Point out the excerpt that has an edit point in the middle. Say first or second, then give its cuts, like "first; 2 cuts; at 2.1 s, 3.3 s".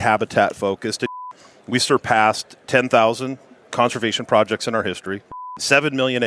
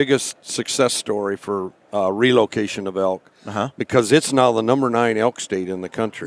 first; 2 cuts; at 1.1 s, 5.3 s